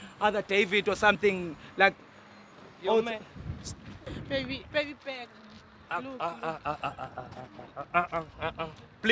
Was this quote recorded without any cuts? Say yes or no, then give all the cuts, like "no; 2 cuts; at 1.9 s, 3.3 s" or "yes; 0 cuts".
no; 1 cut; at 4.1 s